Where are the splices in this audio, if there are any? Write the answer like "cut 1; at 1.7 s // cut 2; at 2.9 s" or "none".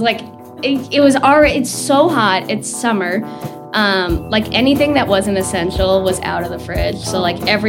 none